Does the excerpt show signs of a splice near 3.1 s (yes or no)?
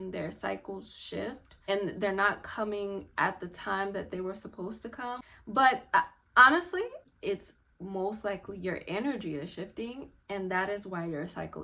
no